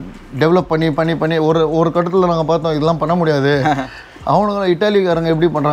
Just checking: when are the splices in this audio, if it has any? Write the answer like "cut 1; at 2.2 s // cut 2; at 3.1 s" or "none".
none

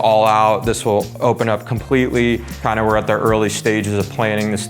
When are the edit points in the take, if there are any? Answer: cut 1; at 2.6 s

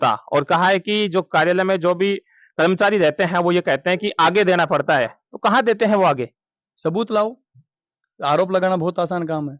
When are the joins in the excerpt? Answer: none

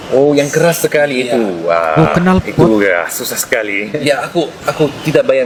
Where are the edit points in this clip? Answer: none

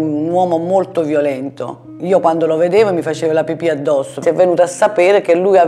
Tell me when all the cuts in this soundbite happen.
none

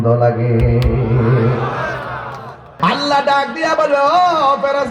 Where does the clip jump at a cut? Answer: cut 1; at 2.8 s

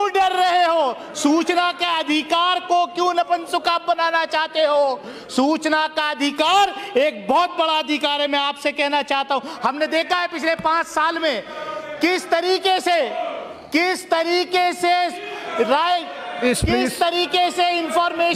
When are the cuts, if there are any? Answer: none

